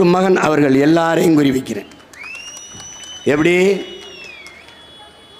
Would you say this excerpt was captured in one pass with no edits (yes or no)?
yes